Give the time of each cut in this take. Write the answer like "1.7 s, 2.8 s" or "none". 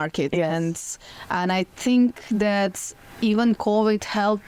none